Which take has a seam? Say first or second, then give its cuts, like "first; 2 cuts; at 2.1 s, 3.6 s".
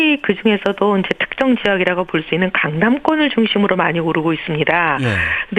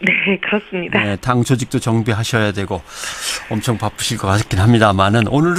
first; 1 cut; at 3.2 s